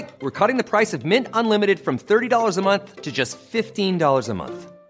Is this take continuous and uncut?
yes; 0 cuts

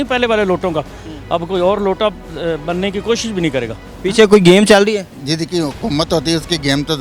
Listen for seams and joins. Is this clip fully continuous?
no; 2 cuts; at 3.8 s, 5.1 s

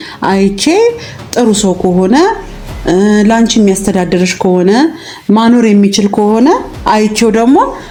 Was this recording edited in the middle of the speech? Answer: no; 0 cuts

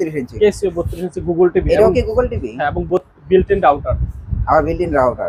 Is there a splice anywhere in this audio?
no; 0 cuts

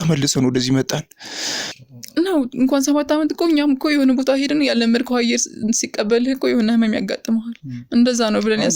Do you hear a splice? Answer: yes; 1 cut; at 1.8 s

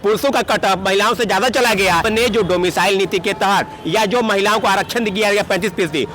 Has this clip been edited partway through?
yes; 1 cut; at 2.1 s

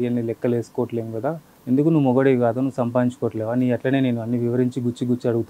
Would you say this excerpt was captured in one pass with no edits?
no; 1 cut; at 1.5 s

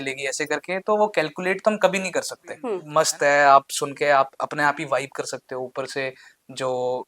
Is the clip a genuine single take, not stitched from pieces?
no; 1 cut; at 2.7 s

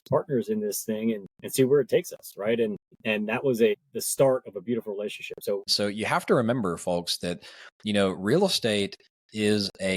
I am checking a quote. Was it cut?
yes; 4 cuts; at 1.3 s, 2.9 s, 3.8 s, 5.7 s

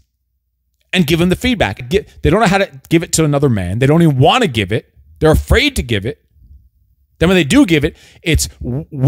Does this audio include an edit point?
yes; 1 cut; at 1.8 s

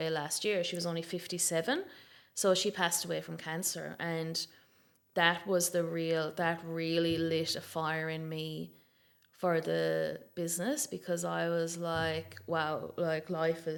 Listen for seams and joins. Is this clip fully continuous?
yes; 0 cuts

